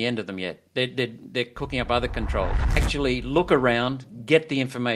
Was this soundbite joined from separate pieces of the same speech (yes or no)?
yes